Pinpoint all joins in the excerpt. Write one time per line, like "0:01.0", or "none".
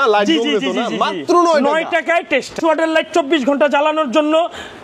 0:02.6